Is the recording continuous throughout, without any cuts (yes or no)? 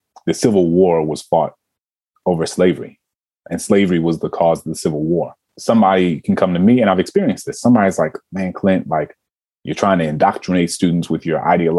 yes